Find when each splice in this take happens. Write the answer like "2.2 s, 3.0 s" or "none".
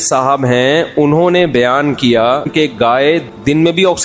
3.0 s